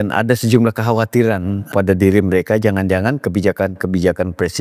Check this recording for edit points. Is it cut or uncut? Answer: cut